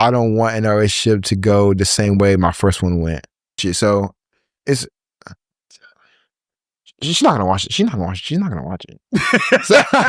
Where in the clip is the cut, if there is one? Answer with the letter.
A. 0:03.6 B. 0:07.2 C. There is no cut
A